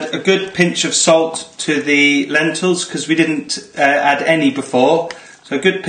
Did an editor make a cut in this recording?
no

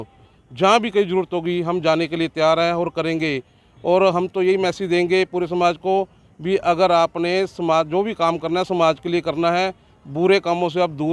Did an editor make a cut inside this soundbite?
no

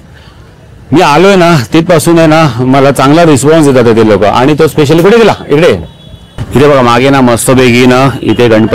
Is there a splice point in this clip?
yes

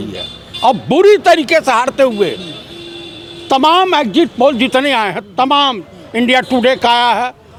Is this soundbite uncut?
yes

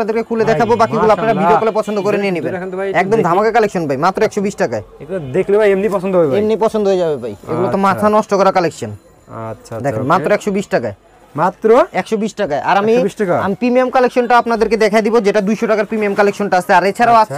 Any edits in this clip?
no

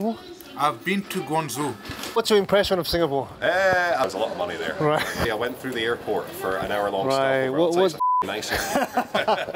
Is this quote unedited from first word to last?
no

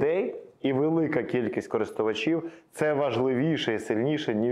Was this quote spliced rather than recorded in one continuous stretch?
no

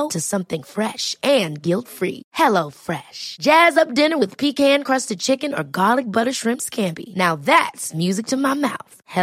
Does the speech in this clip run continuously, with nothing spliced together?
yes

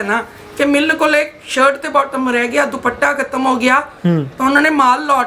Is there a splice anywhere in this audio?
no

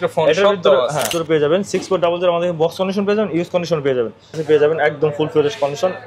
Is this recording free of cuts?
no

